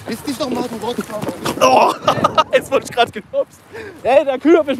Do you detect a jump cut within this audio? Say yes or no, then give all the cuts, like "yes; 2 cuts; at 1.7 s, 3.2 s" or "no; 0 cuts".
no; 0 cuts